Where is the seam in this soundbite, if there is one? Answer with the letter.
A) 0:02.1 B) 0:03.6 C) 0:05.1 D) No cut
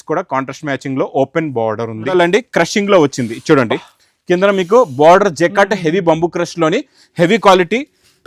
A